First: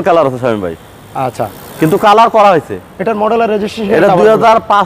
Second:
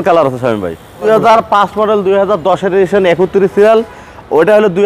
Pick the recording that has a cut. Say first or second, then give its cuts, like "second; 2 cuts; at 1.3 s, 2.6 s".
second; 1 cut; at 1.0 s